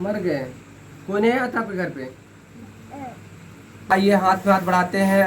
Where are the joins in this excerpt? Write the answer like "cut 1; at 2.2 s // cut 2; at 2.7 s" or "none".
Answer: cut 1; at 3.9 s